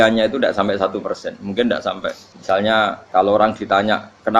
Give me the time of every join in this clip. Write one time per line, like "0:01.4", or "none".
0:02.3
0:03.0